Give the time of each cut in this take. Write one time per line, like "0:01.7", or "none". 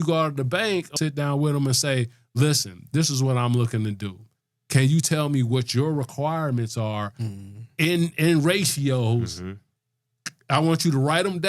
0:00.9